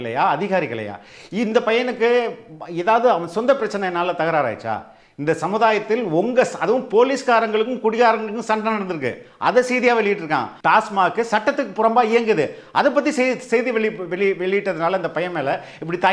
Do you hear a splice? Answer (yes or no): yes